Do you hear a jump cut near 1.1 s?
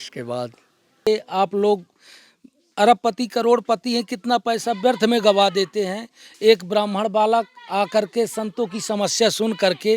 yes; 1 cut; at 1.1 s

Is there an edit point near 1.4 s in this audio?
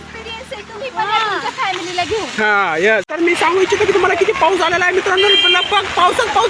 no; 1 cut; at 3.1 s

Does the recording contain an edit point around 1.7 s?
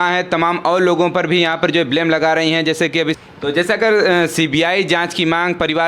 no; 1 cut; at 3.2 s

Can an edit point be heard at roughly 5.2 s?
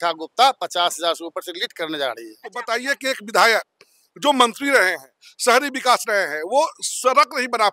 no; 1 cut; at 2.6 s

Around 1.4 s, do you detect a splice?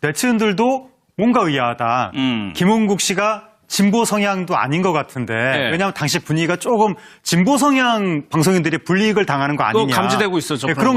no; 1 cut; at 5.9 s

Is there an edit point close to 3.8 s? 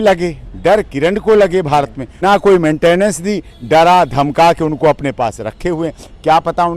no; 1 cut; at 2.0 s

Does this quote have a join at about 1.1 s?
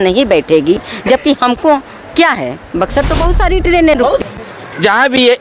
no; 1 cut; at 4.2 s

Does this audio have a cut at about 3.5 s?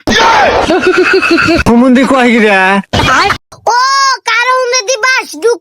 yes; 1 cut; at 3.5 s

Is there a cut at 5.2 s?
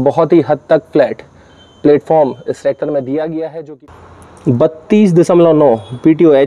no; 1 cut; at 3.6 s

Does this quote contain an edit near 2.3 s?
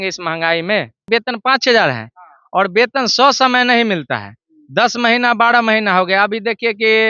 no; 1 cut; at 1.0 s

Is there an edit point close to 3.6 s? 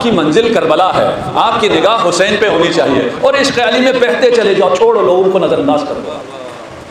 no; 0 cuts

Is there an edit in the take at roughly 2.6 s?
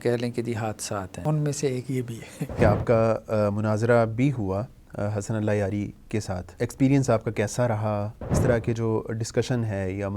yes; 4 cuts; at 1.2 s, 2.6 s, 6.5 s, 8.4 s

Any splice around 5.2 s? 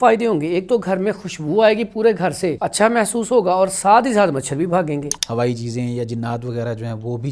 yes; 2 cuts; at 2.6 s, 5.2 s

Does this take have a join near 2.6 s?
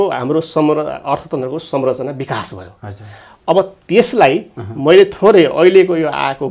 no; 0 cuts

